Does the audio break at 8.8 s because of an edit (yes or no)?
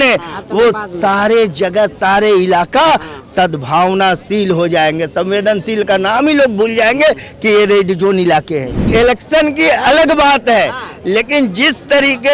yes